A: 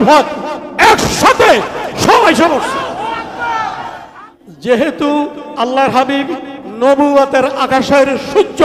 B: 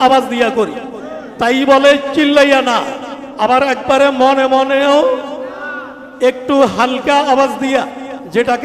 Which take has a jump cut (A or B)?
A